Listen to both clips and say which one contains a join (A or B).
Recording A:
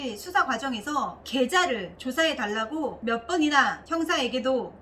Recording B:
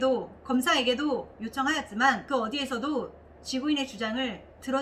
B